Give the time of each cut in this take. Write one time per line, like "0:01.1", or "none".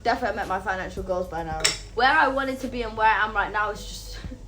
0:01.8